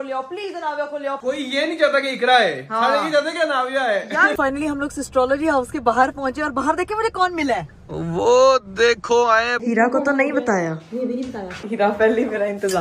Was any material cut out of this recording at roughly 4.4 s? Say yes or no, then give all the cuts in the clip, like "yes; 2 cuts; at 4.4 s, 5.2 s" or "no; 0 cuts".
yes; 4 cuts; at 1.2 s, 4.4 s, 9.5 s, 11.6 s